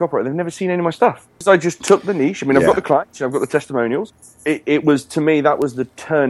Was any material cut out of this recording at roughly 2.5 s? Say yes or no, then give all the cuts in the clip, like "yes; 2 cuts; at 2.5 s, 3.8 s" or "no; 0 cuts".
no; 2 cuts; at 1.3 s, 4.1 s